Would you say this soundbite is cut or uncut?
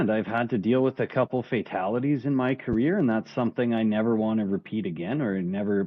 uncut